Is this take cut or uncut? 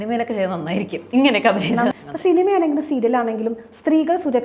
cut